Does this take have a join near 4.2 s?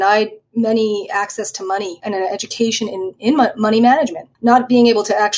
yes; 2 cuts; at 2.0 s, 4.2 s

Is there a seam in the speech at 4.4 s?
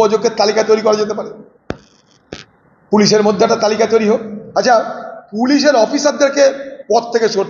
yes; 1 cut; at 4.4 s

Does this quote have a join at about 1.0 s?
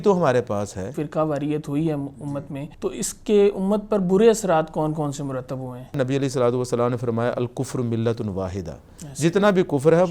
yes; 3 cuts; at 1.0 s, 2.6 s, 6.0 s

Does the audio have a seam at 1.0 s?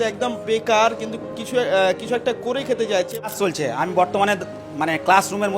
no; 1 cut; at 3.3 s

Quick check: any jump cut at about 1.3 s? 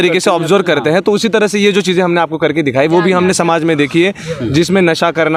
no; 0 cuts

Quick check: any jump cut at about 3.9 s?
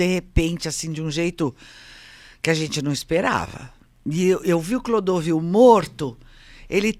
no; 0 cuts

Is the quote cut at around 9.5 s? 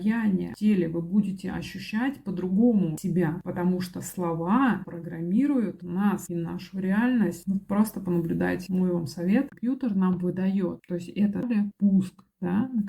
yes; 2 cuts; at 9.5 s, 11.4 s

